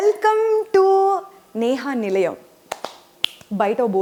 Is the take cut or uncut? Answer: uncut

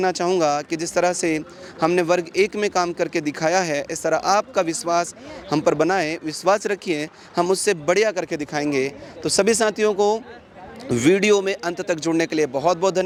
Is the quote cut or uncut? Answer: uncut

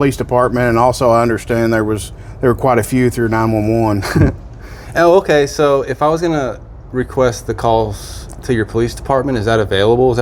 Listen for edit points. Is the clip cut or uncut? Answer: uncut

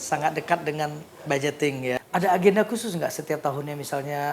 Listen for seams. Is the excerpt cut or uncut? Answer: cut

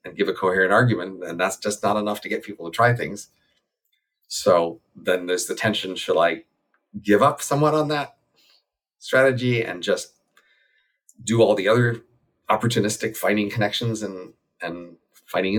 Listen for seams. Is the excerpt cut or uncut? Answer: uncut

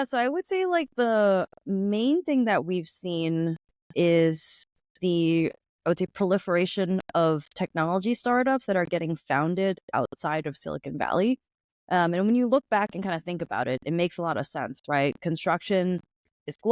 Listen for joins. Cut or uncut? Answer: uncut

